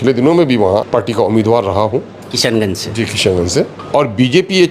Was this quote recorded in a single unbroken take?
no; 2 cuts; at 0.9 s, 3.8 s

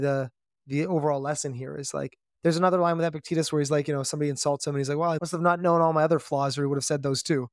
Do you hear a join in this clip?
yes; 1 cut; at 5.2 s

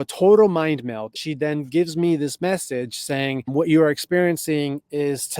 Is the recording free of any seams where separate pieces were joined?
no; 2 cuts; at 1.2 s, 3.5 s

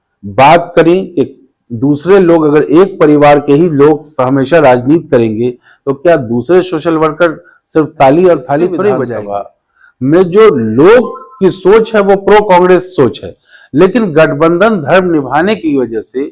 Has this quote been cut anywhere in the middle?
yes; 1 cut; at 9.2 s

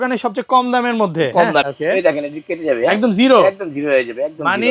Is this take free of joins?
no; 1 cut; at 1.7 s

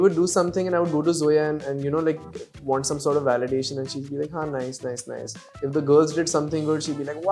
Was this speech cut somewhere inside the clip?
no; 0 cuts

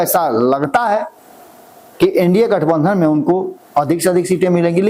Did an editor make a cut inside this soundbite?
no; 0 cuts

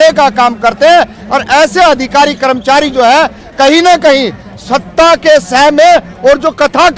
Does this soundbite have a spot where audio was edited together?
no; 0 cuts

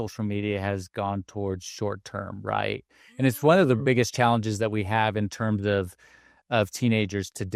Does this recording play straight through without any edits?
yes; 0 cuts

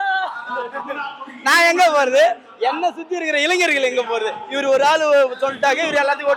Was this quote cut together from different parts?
no; 0 cuts

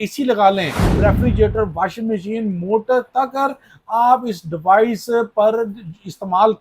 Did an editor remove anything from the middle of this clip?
yes; 1 cut; at 1.0 s

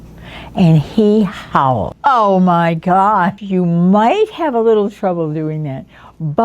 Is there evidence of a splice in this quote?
yes; 2 cuts; at 1.9 s, 3.3 s

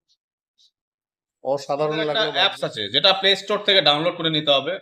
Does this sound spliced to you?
yes; 1 cut; at 2.3 s

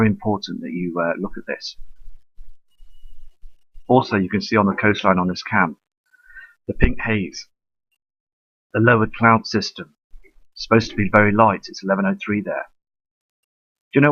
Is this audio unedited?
yes; 0 cuts

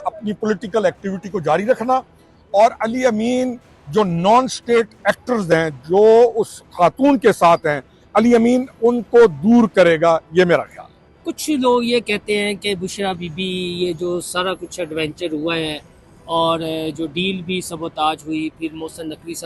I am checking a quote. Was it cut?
no; 0 cuts

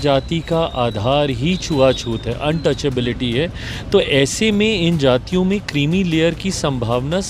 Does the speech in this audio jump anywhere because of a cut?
no; 0 cuts

